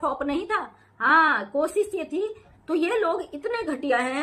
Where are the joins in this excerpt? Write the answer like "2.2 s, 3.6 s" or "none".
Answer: 2.4 s